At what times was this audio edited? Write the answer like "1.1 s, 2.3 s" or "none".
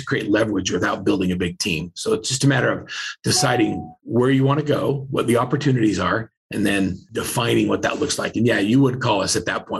4.1 s, 7.2 s